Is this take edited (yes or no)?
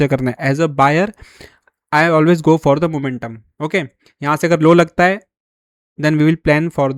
no